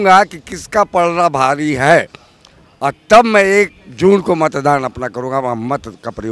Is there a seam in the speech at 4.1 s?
no; 0 cuts

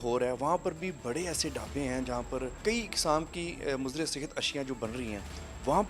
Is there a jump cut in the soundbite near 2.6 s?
yes; 1 cut; at 2.6 s

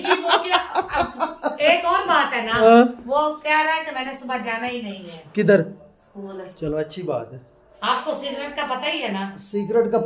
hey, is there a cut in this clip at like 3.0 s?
no; 0 cuts

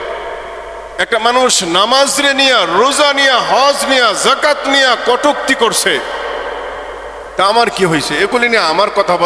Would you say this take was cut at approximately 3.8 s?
no; 0 cuts

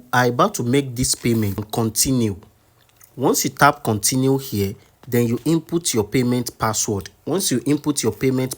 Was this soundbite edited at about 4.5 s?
no; 1 cut; at 1.7 s

